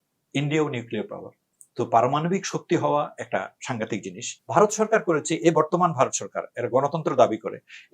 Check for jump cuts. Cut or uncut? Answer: cut